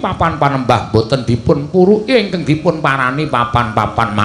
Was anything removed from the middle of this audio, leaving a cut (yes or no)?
no